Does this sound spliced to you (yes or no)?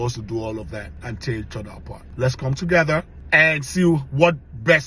yes